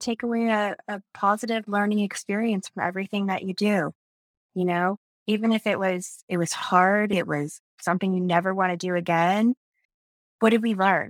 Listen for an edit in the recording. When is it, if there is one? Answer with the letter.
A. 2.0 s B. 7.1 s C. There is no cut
B